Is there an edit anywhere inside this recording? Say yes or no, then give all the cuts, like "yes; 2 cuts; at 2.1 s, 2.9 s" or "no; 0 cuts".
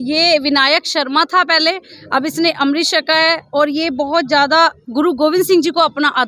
no; 0 cuts